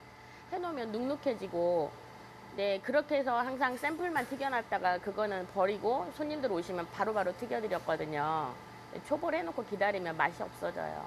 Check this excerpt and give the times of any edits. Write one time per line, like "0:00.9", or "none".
none